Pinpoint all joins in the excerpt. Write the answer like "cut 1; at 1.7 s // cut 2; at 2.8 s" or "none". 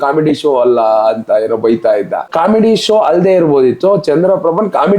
cut 1; at 2.3 s